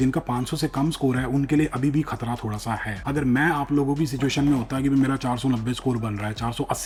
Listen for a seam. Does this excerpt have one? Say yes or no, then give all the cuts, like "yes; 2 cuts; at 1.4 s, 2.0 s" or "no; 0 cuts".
no; 0 cuts